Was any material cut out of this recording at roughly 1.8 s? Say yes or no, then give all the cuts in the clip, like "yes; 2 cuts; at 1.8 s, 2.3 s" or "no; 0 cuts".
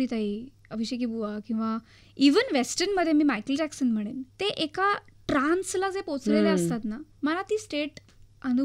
no; 2 cuts; at 4.2 s, 7.1 s